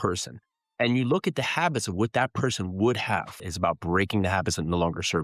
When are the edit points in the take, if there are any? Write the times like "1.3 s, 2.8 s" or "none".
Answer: 3.3 s